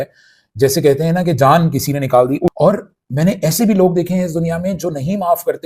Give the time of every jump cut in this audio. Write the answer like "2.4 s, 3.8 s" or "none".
2.5 s